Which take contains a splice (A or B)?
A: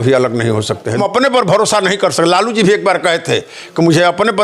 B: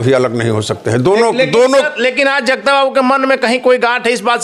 A